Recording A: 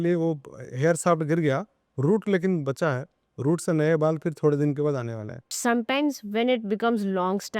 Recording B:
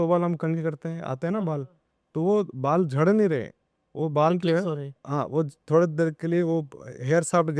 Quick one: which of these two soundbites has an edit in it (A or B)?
A